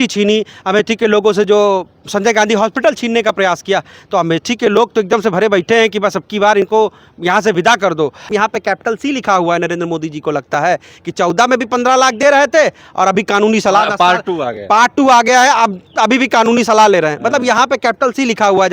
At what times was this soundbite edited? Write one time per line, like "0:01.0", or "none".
0:08.2